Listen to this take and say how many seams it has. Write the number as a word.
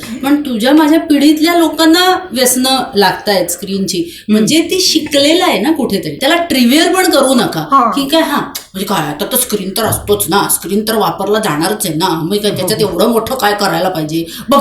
one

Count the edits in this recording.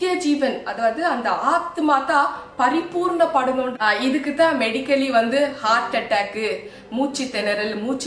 one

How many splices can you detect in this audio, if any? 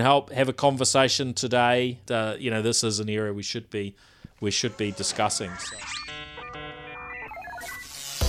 two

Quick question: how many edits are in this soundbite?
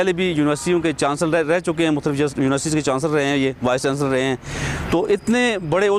zero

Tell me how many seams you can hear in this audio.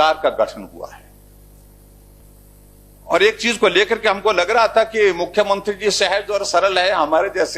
one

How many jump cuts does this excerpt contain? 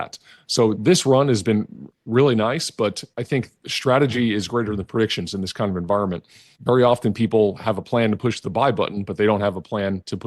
three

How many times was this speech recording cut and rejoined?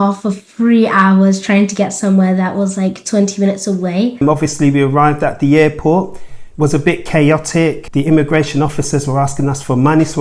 two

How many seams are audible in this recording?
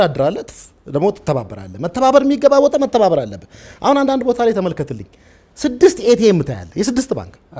zero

